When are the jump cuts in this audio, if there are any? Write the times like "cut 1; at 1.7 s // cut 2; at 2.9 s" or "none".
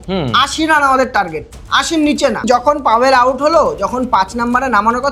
cut 1; at 2.4 s